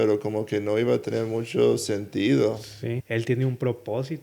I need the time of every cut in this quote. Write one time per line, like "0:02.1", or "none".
0:03.0